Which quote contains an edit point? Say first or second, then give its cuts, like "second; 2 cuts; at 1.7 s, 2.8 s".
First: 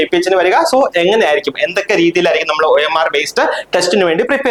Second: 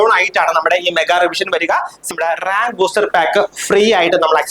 second; 1 cut; at 2.1 s